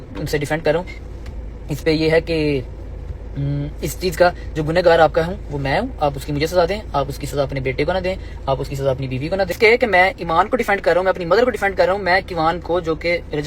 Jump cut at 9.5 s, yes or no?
yes